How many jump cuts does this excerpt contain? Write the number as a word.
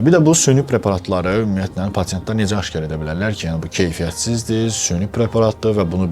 zero